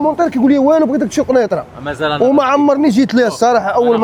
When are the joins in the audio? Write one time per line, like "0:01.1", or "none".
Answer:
none